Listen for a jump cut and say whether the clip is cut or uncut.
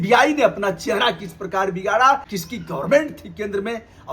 cut